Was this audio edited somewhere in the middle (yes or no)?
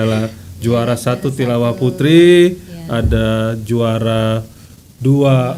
no